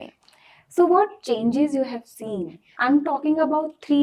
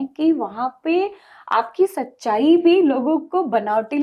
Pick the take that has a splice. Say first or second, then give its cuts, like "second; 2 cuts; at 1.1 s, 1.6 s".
first; 1 cut; at 2.7 s